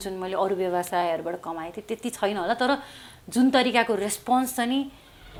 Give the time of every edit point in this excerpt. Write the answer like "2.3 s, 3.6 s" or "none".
none